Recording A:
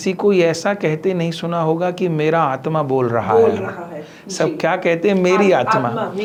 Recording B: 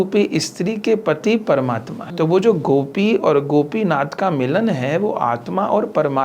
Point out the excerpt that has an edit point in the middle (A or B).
B